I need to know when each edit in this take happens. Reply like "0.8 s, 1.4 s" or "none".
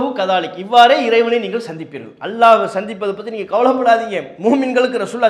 none